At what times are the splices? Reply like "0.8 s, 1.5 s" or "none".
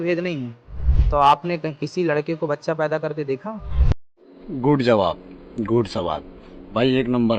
none